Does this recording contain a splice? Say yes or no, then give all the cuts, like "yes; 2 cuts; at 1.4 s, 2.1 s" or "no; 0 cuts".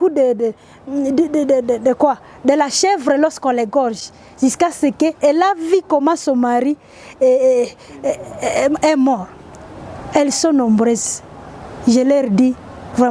no; 0 cuts